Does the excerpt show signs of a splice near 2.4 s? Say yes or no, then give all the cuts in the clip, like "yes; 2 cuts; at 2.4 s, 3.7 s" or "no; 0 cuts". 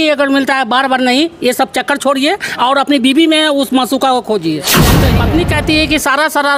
no; 1 cut; at 4.9 s